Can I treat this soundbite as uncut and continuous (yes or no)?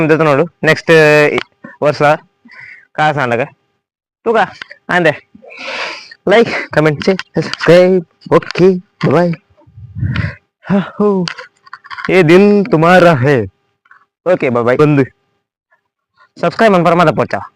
no